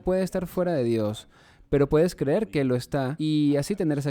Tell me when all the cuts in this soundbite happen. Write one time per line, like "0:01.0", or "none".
0:03.1